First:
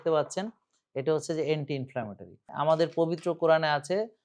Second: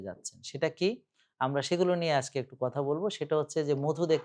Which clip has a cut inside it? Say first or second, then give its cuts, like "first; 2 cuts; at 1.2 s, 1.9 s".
first; 1 cut; at 2.5 s